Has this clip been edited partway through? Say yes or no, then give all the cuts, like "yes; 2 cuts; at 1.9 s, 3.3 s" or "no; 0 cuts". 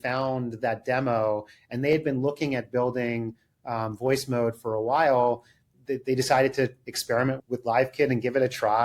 yes; 1 cut; at 5.7 s